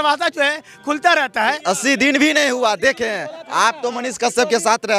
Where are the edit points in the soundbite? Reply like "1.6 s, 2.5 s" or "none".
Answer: 1.6 s